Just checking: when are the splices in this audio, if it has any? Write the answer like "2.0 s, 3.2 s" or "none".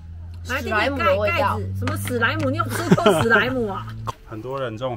3.9 s